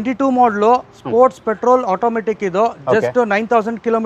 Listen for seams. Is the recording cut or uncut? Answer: uncut